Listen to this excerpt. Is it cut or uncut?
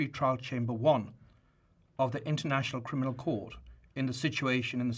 uncut